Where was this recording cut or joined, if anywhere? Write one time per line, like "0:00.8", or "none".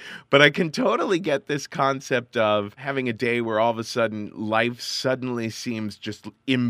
0:02.8

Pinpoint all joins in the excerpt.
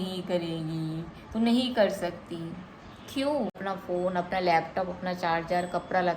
0:03.6

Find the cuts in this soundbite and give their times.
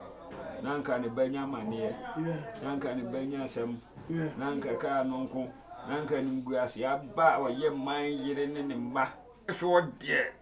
0:09.5

